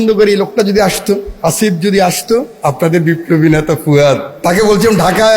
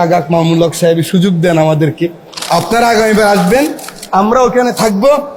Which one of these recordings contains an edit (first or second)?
first